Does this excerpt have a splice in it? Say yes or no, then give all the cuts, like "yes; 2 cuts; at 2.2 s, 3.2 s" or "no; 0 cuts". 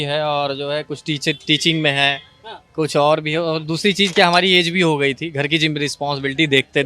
no; 0 cuts